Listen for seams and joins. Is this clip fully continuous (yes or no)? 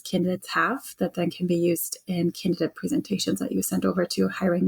yes